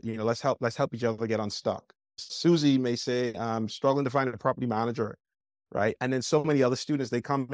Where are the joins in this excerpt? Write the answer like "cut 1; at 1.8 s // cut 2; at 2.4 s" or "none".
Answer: cut 1; at 2.2 s // cut 2; at 3.3 s